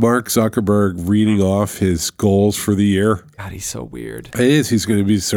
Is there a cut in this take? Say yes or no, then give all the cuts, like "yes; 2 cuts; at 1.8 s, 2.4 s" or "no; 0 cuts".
no; 0 cuts